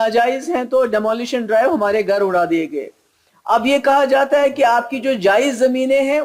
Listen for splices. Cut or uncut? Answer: uncut